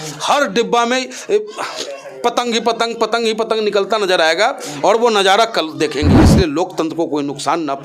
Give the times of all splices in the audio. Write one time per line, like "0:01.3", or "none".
0:06.2

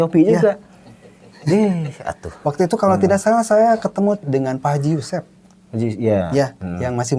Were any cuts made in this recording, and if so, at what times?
none

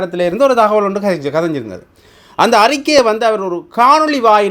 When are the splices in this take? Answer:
none

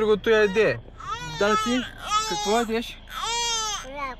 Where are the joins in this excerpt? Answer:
none

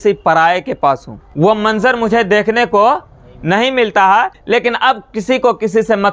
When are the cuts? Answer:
0:01.2
0:04.4

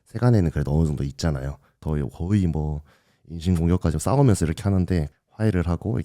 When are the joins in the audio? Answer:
0:01.7

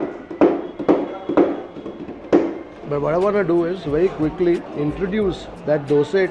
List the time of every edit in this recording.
0:02.8

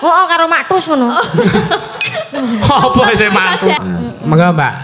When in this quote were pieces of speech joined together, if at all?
0:03.8

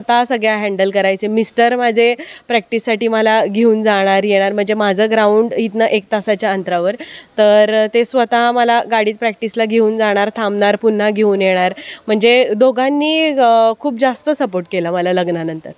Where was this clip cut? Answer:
none

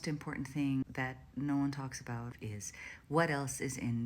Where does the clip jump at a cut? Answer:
0:00.8
0:02.3

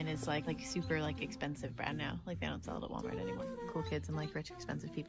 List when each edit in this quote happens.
0:03.6

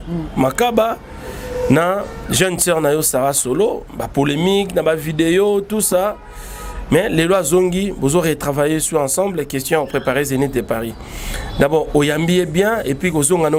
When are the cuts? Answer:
none

